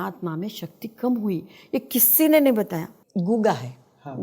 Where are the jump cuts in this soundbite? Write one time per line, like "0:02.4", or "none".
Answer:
0:02.9